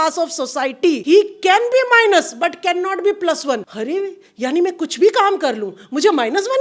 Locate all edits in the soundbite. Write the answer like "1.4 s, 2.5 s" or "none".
1.0 s, 3.7 s

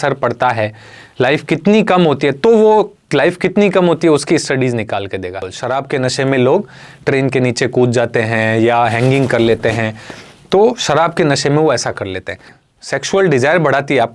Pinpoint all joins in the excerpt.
5.5 s, 12.6 s

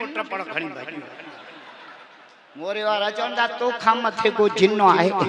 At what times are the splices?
none

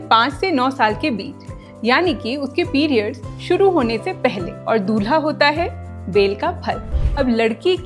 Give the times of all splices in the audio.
6.9 s

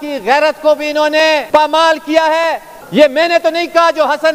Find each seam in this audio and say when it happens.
1.4 s, 2.7 s

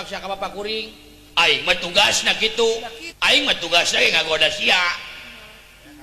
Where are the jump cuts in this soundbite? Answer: 3.0 s

